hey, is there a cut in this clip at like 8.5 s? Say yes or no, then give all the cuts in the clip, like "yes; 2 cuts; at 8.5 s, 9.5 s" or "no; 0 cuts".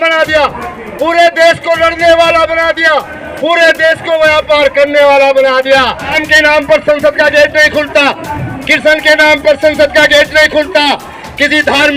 no; 1 cut; at 6.2 s